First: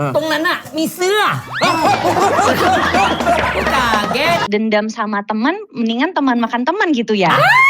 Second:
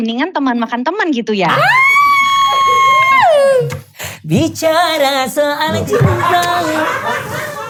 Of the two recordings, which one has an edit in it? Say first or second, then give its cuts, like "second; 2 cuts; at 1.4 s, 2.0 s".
first; 1 cut; at 4.4 s